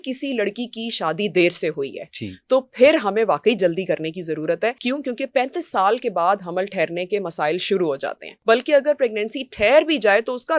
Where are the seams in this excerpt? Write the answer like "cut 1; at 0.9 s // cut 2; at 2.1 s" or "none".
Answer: cut 1; at 4.8 s // cut 2; at 8.3 s